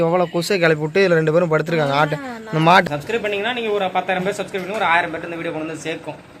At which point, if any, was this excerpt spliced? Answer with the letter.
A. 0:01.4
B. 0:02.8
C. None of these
B